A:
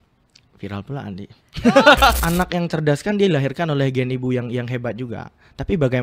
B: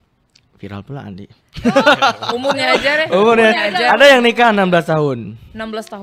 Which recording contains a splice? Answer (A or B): A